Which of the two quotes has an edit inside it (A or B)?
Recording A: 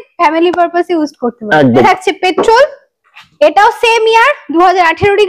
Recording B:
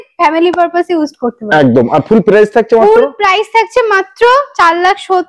A